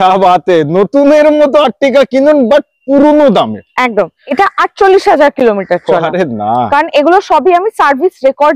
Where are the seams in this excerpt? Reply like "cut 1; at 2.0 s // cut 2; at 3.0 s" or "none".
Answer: cut 1; at 4.4 s